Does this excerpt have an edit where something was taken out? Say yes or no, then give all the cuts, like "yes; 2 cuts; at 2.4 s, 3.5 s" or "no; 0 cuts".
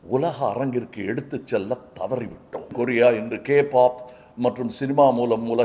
yes; 1 cut; at 2.7 s